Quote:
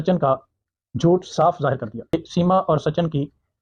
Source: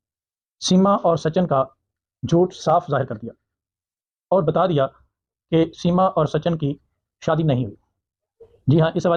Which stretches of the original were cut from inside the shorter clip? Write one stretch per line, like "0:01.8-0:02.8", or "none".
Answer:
0:03.4-0:05.6

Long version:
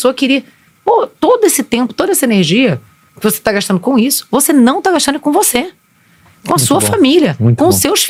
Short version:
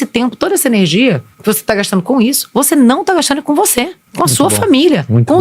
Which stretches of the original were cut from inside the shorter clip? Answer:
0:02.9-0:03.1
0:05.8-0:06.3

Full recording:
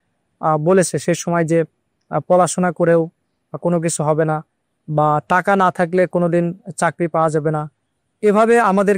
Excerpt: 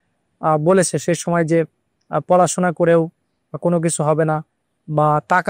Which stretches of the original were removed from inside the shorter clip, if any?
none

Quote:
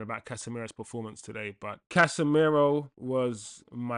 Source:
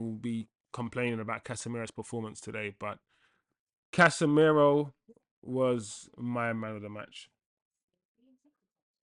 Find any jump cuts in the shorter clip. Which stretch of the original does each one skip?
0:03.0-0:03.8
0:05.0-0:05.4

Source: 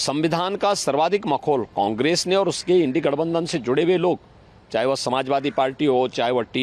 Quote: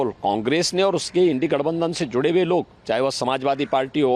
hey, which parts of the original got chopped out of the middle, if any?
0:04.3-0:04.6

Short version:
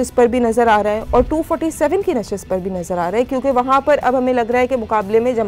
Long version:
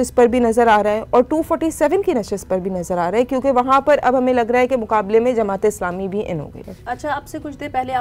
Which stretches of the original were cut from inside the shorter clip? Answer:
none

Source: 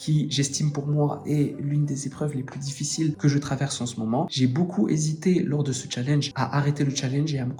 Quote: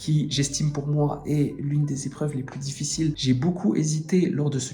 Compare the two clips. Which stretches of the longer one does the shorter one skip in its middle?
0:03.2-0:04.3

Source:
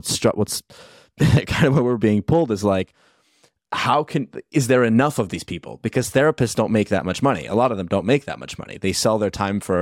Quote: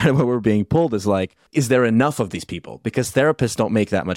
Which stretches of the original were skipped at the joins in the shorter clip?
0:03.0-0:04.4

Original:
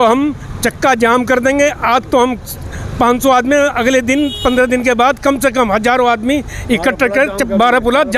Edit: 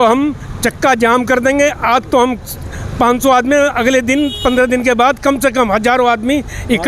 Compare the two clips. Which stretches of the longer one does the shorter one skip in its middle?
none

